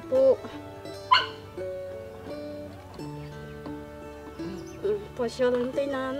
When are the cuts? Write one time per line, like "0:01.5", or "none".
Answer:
0:01.7
0:04.7